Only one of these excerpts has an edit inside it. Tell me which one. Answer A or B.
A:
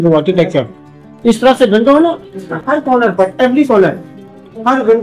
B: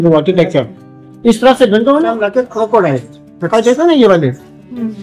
B